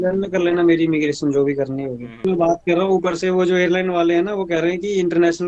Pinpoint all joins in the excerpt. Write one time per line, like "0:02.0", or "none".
0:02.2